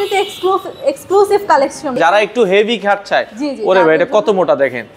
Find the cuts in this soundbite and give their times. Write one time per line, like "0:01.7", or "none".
0:02.0